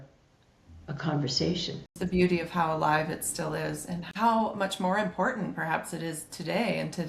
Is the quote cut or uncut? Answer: cut